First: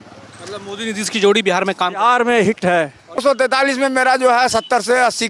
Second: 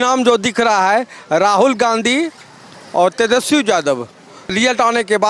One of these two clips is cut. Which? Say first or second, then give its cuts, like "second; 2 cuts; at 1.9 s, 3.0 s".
first; 1 cut; at 3.2 s